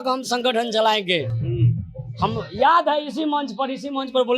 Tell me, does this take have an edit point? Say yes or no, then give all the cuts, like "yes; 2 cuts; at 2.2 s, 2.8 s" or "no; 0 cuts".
no; 0 cuts